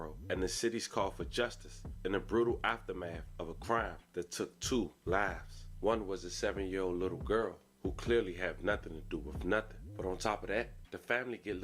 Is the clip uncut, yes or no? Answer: yes